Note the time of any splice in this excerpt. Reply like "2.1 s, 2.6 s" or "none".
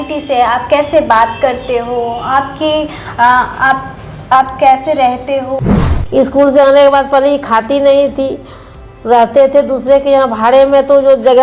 5.6 s